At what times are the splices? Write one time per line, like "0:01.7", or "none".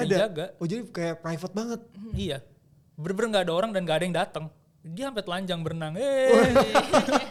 none